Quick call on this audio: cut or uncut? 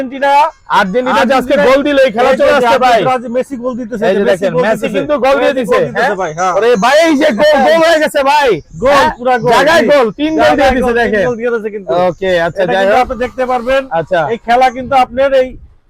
uncut